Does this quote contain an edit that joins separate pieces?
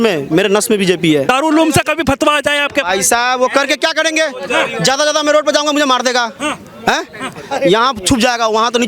yes; 1 cut; at 1.2 s

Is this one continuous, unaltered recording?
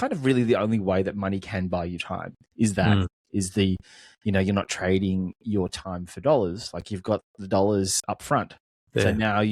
no; 1 cut; at 8.0 s

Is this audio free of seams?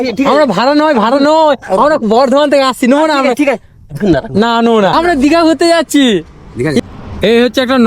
no; 2 cuts; at 4.9 s, 6.8 s

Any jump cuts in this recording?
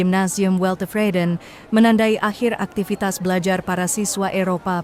no; 0 cuts

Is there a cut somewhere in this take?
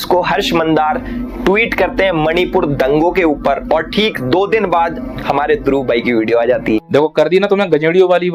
no; 0 cuts

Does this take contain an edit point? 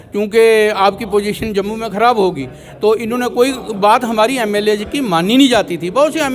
no; 0 cuts

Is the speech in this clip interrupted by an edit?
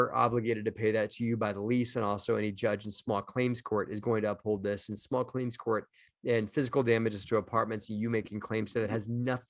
no; 0 cuts

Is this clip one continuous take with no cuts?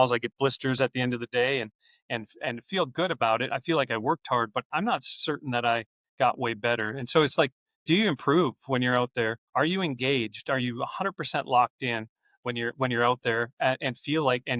no; 2 cuts; at 6.0 s, 9.4 s

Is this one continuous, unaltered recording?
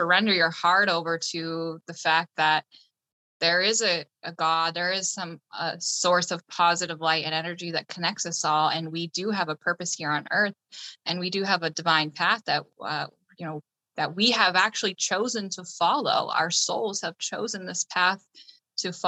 yes; 0 cuts

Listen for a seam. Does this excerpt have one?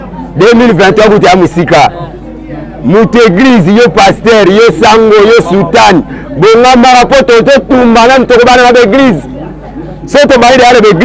no; 0 cuts

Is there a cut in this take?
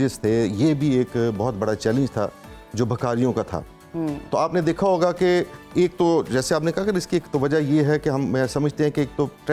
no; 0 cuts

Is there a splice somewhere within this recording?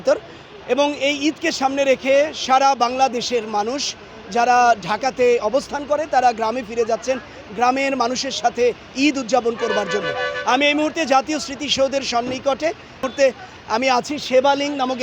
yes; 1 cut; at 13.0 s

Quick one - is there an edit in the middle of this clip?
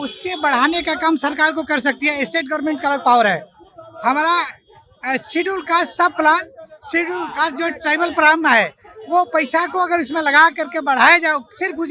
no; 0 cuts

